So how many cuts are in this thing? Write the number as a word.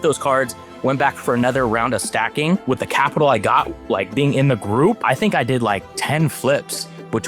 two